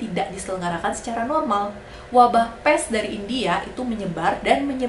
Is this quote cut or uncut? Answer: cut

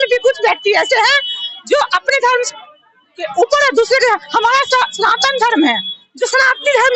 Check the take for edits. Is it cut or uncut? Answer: uncut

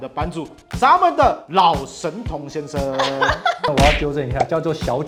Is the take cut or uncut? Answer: uncut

